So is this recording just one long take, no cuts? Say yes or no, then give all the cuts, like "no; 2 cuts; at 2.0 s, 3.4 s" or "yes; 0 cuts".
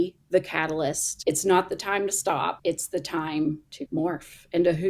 no; 3 cuts; at 1.1 s, 2.6 s, 3.7 s